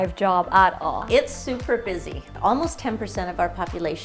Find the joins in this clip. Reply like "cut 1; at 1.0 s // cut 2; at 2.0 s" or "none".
cut 1; at 1.0 s // cut 2; at 2.3 s